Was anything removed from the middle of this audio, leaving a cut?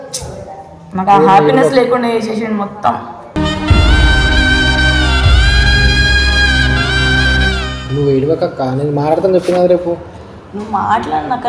no; 0 cuts

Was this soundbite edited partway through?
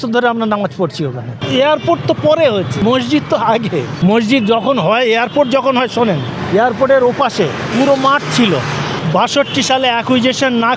yes; 6 cuts; at 1.4 s, 2.7 s, 3.9 s, 6.3 s, 7.6 s, 9.0 s

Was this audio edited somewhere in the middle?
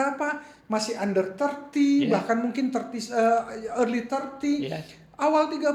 no; 0 cuts

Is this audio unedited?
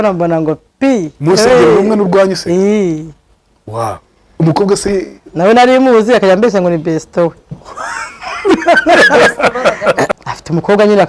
no; 1 cut; at 10.1 s

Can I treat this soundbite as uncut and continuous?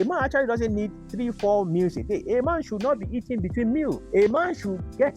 no; 1 cut; at 4.0 s

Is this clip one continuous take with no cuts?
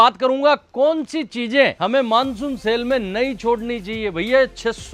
yes; 0 cuts

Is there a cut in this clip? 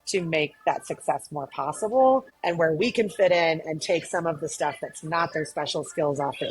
yes; 1 cut; at 2.3 s

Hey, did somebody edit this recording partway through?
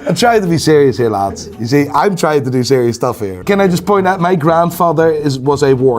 yes; 1 cut; at 3.3 s

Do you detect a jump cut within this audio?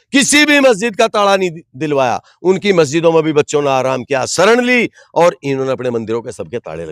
no; 0 cuts

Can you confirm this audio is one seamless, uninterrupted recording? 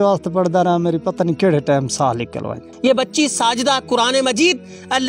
no; 1 cut; at 2.7 s

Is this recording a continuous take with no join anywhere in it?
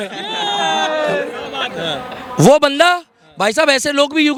yes; 0 cuts

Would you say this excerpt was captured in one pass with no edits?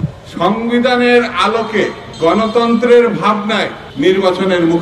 no; 2 cuts; at 2.0 s, 3.8 s

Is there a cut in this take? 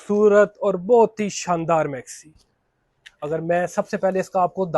no; 0 cuts

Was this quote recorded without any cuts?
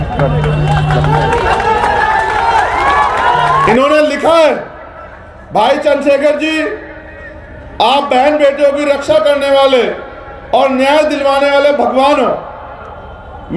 no; 1 cut; at 3.7 s

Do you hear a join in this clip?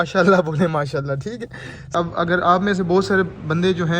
yes; 1 cut; at 1.9 s

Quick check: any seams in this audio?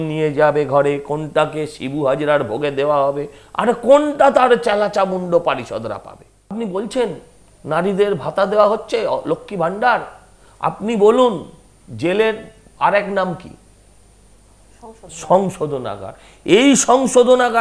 yes; 1 cut; at 6.5 s

